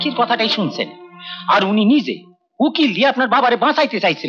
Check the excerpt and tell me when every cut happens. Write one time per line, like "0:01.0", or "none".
none